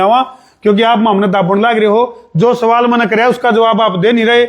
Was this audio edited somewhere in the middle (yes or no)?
no